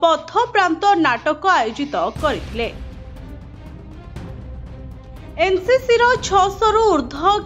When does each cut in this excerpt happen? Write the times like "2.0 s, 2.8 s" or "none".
2.7 s, 5.0 s